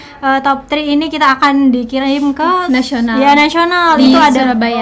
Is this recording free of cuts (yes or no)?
yes